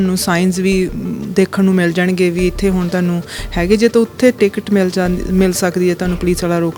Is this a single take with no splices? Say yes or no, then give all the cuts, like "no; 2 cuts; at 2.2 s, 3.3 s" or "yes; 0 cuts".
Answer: yes; 0 cuts